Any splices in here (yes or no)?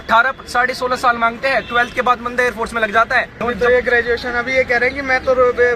yes